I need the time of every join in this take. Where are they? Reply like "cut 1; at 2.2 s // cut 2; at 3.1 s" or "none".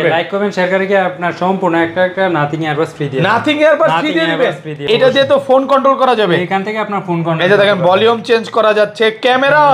cut 1; at 4.8 s

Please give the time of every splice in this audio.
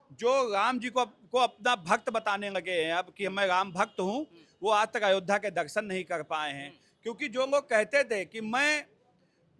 none

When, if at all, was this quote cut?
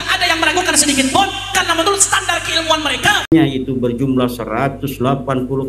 cut 1; at 3.3 s

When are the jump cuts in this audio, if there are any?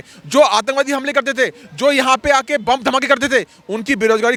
none

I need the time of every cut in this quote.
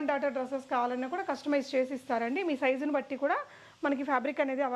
none

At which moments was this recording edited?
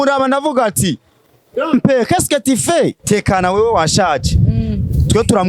cut 1; at 3.0 s

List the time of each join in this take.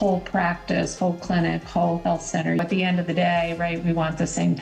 cut 1; at 2.6 s

